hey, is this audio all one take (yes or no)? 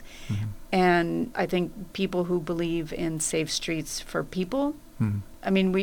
yes